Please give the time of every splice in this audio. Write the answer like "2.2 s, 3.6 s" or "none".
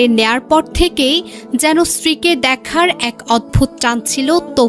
none